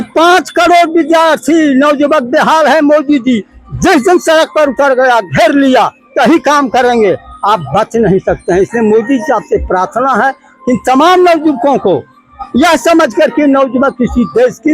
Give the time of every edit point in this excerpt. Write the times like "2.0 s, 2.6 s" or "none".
none